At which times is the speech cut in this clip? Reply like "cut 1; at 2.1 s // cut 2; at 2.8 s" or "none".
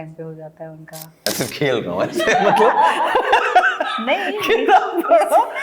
cut 1; at 1.3 s